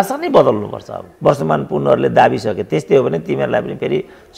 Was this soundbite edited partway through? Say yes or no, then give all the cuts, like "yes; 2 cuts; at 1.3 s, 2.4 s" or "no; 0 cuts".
yes; 1 cut; at 1.0 s